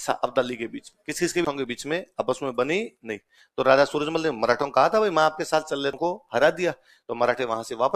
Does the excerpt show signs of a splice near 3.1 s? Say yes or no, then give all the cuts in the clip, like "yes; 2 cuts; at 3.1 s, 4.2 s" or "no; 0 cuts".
no; 2 cuts; at 1.4 s, 6.0 s